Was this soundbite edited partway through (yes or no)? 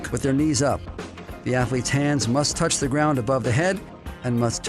no